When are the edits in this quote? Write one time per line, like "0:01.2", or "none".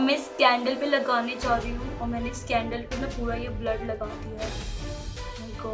none